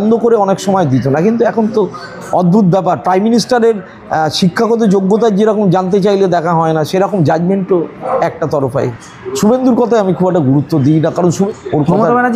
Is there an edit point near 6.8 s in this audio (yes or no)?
no